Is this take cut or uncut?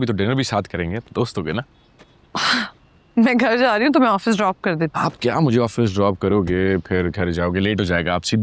uncut